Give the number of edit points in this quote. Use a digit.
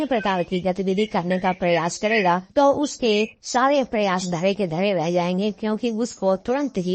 0